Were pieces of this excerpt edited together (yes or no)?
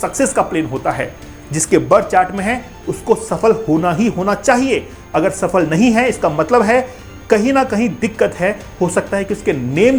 no